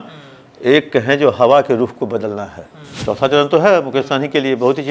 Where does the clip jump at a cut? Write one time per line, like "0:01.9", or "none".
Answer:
0:02.9